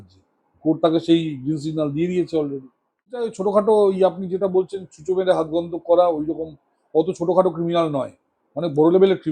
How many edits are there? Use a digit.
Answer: 1